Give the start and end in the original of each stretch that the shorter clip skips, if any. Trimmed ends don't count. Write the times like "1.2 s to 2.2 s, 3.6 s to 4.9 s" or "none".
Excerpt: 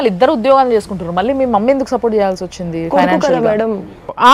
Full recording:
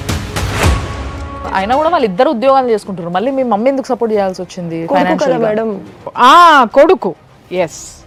none